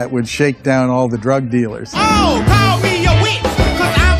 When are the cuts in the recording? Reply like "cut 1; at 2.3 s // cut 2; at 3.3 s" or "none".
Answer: none